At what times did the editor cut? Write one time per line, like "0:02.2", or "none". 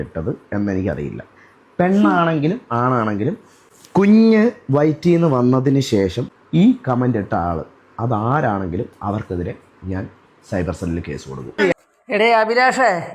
0:11.4